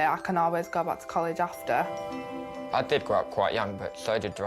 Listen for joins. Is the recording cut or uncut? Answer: cut